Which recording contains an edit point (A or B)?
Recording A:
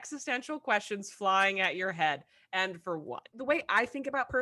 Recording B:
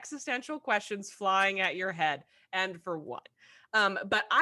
A